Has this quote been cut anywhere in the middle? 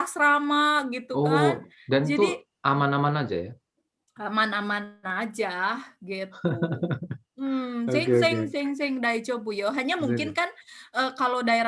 no; 0 cuts

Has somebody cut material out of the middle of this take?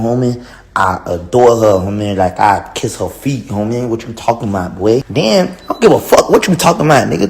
yes; 1 cut; at 5.1 s

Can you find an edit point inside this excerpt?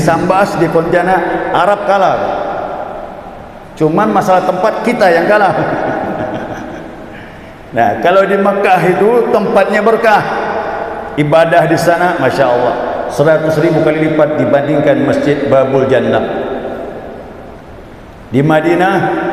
no; 0 cuts

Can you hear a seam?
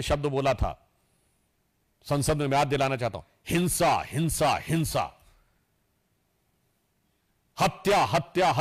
no; 0 cuts

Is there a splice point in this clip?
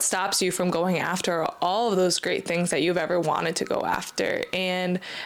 no; 0 cuts

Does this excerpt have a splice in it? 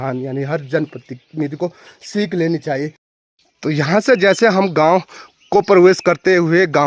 yes; 1 cut; at 3.0 s

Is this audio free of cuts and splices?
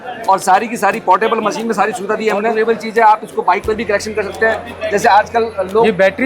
no; 1 cut; at 2.5 s

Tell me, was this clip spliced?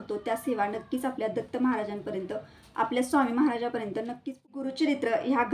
yes; 1 cut; at 4.4 s

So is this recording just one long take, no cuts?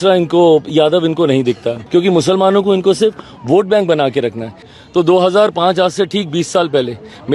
no; 2 cuts; at 1.8 s, 4.6 s

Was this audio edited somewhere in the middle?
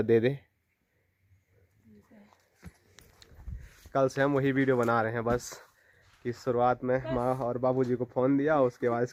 no; 0 cuts

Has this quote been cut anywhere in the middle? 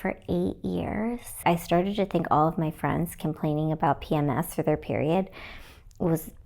yes; 1 cut; at 1.4 s

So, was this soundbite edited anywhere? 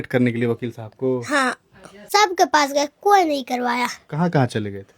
yes; 1 cut; at 2.0 s

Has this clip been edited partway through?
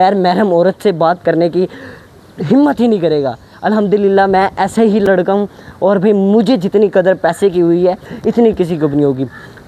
no; 0 cuts

